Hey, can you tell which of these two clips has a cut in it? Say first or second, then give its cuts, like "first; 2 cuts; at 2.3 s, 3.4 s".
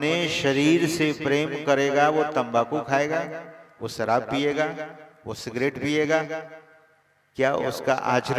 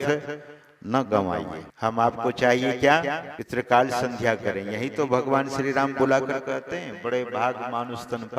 second; 2 cuts; at 1.6 s, 3.3 s